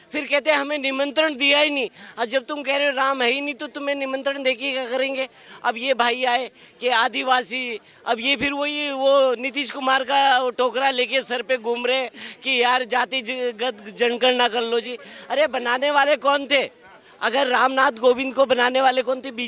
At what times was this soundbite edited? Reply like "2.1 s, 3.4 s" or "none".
none

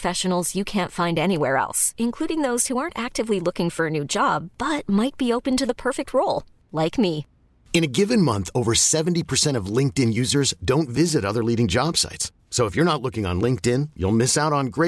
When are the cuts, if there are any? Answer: none

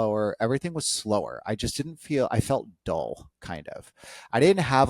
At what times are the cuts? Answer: none

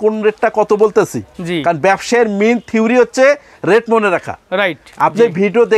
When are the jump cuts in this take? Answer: 4.8 s

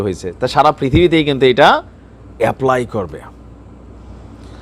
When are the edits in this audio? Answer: none

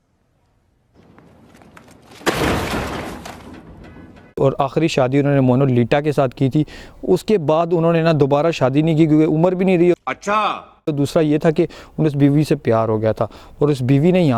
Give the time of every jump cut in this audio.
none

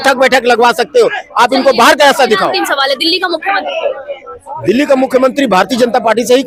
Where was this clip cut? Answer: none

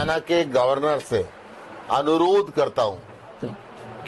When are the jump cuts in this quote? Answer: none

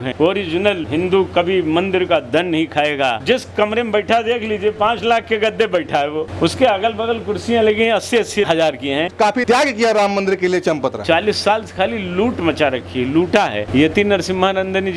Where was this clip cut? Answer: 3.2 s, 9.1 s, 11.0 s, 13.7 s

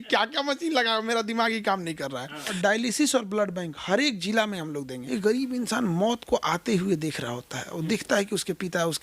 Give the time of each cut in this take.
2.5 s, 5.1 s

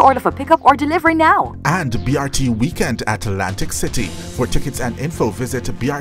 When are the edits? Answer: 1.9 s

